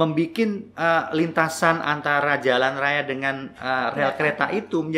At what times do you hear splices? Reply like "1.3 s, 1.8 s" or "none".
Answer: none